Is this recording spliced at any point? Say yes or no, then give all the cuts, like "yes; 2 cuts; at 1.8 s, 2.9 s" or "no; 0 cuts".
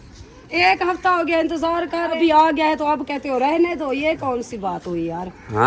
yes; 1 cut; at 2.1 s